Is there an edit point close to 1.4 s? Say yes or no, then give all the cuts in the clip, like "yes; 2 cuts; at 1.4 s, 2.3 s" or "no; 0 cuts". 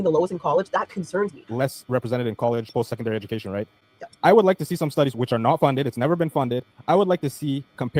yes; 1 cut; at 1.4 s